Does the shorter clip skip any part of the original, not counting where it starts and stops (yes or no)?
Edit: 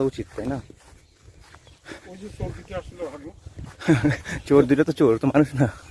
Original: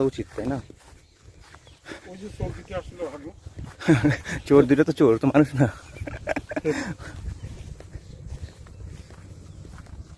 no